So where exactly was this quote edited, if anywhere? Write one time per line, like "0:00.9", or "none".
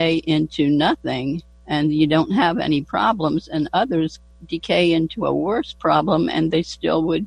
0:01.5